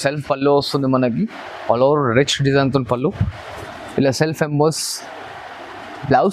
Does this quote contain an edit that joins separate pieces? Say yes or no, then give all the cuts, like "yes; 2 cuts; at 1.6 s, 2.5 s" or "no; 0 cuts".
no; 0 cuts